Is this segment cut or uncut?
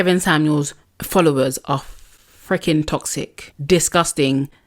uncut